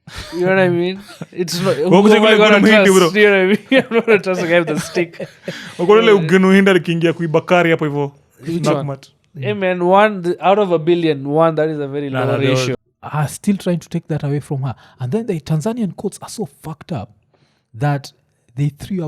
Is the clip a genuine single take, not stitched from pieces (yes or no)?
no